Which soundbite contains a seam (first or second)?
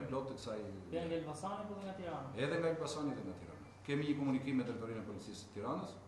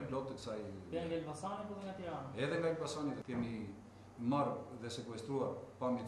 second